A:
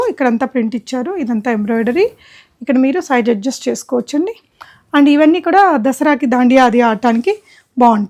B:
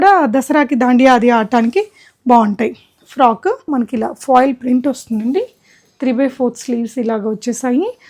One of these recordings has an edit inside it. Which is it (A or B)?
B